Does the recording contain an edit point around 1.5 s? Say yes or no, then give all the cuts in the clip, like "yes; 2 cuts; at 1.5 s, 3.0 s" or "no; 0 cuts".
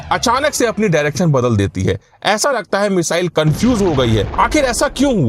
no; 1 cut; at 4.3 s